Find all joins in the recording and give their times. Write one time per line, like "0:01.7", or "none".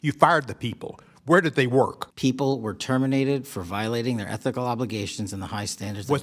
0:02.0